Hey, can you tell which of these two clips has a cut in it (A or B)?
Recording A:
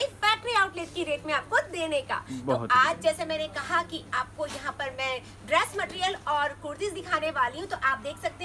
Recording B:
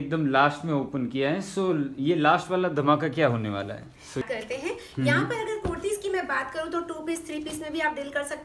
B